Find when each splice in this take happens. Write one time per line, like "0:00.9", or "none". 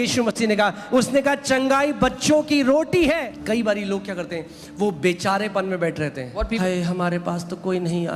0:03.3
0:06.6